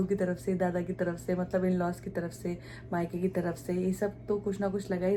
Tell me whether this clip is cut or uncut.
uncut